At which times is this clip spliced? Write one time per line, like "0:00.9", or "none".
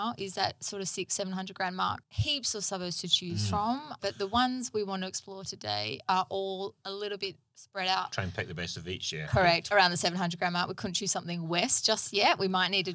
0:02.1
0:08.1